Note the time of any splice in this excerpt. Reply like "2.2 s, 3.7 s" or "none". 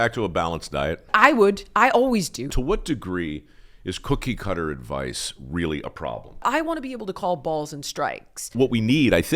1.1 s, 2.5 s, 6.4 s, 8.5 s